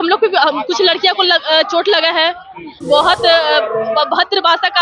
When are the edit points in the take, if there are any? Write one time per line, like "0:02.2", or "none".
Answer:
0:02.8